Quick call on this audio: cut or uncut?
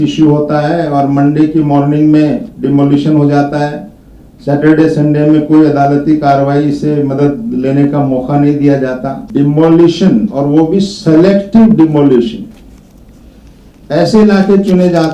cut